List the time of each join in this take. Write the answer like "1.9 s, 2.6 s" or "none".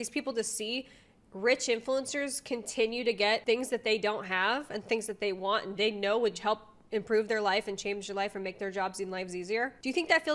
none